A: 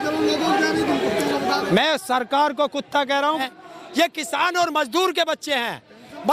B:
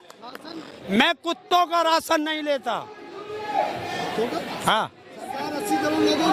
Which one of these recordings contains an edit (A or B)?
A